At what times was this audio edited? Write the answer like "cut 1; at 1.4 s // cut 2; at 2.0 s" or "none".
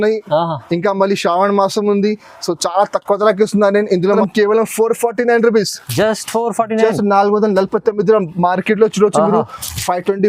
cut 1; at 4.2 s